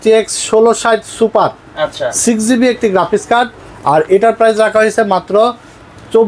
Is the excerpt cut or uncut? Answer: uncut